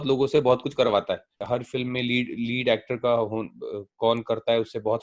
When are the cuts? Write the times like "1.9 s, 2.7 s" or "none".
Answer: 1.4 s